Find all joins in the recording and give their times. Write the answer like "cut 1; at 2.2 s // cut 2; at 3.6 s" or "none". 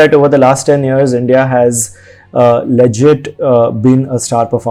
none